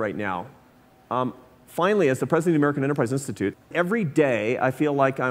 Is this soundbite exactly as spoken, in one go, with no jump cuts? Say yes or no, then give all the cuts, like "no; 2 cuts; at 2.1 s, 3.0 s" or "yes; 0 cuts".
no; 1 cut; at 3.6 s